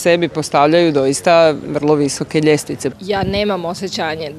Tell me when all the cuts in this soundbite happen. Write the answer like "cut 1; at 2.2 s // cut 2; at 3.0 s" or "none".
none